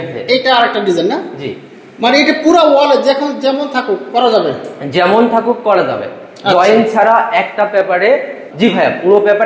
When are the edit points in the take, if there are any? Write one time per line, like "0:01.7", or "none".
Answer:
none